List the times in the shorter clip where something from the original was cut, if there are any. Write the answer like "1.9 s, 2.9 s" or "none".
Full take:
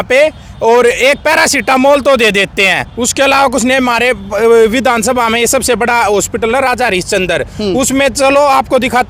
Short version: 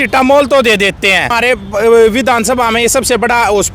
1.3 s